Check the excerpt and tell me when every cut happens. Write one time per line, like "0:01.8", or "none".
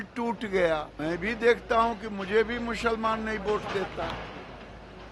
0:00.9